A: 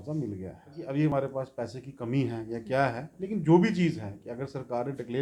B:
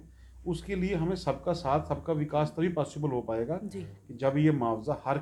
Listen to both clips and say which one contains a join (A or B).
A